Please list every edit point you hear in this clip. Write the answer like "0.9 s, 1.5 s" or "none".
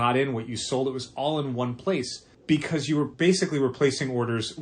2.2 s, 3.1 s